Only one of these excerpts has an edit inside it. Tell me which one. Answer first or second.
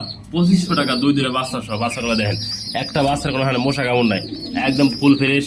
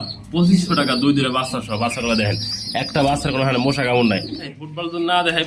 second